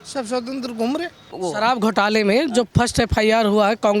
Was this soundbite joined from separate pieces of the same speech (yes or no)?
yes